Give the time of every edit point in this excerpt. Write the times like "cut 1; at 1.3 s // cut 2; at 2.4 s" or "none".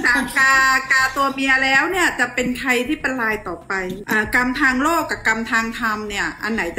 cut 1; at 4.0 s